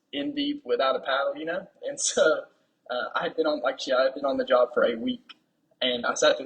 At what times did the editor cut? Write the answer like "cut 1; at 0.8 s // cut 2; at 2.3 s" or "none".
cut 1; at 5.3 s